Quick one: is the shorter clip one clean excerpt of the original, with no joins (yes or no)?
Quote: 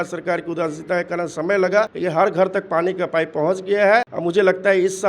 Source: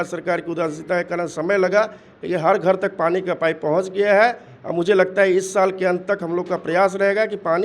no